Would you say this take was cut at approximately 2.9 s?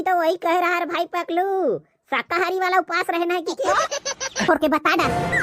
no; 1 cut; at 4.4 s

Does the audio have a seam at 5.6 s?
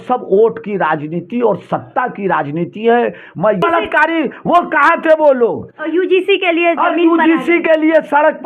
no; 1 cut; at 3.6 s

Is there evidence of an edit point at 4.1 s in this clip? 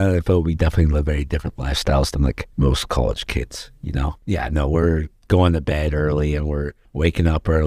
yes; 1 cut; at 4.1 s

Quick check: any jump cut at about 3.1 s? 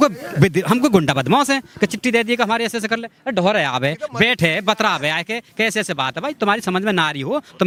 no; 0 cuts

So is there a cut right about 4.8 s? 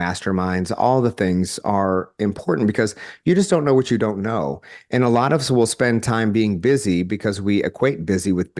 no; 0 cuts

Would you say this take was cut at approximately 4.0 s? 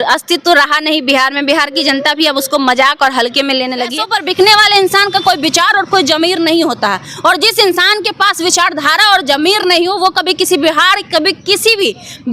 yes; 1 cut; at 4.0 s

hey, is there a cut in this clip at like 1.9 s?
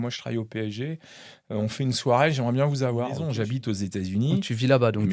no; 1 cut; at 3.3 s

